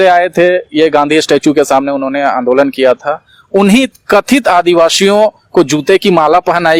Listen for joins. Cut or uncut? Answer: uncut